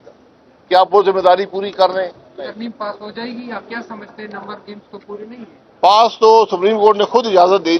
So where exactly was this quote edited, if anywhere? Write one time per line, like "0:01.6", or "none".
0:02.5

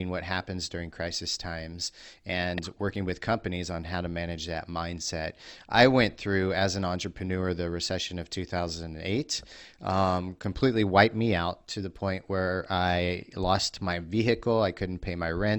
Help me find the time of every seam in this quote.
none

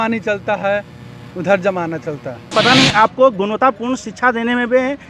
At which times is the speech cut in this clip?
0:02.5

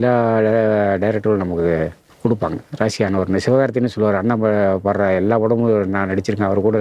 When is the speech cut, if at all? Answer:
0:02.0

